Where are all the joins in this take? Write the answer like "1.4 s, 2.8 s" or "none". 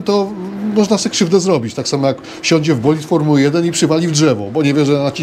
none

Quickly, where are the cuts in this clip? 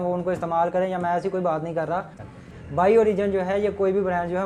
2.2 s

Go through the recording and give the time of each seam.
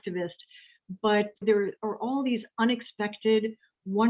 1.4 s

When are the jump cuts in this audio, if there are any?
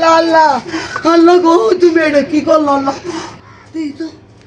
3.3 s

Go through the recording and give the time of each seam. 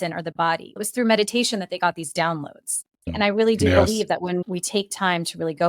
3.1 s, 4.4 s

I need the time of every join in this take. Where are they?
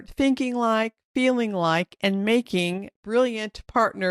2.9 s

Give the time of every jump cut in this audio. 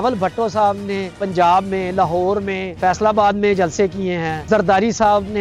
1.2 s, 2.8 s, 4.3 s

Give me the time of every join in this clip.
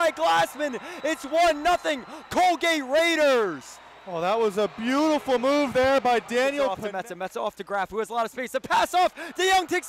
6.8 s

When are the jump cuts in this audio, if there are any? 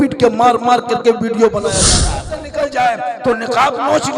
1.9 s

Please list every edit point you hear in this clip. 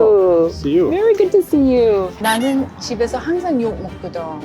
2.1 s

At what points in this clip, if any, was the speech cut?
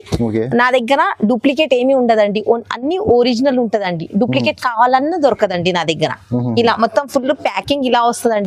none

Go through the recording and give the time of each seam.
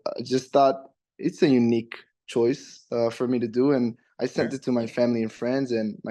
none

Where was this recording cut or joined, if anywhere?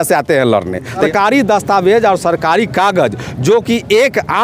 1.1 s

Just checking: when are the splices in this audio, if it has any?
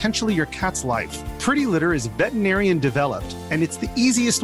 none

